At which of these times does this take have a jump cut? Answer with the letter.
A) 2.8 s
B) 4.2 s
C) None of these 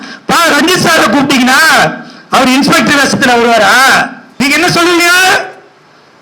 B